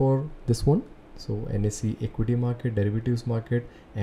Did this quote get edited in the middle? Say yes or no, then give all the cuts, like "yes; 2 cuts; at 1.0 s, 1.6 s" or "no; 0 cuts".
no; 0 cuts